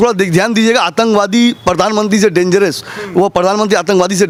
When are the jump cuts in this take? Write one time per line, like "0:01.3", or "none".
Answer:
none